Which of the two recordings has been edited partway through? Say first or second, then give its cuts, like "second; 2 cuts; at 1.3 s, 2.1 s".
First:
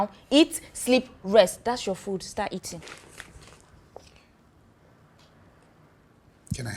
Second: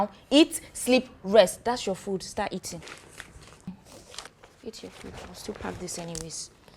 second; 1 cut; at 3.7 s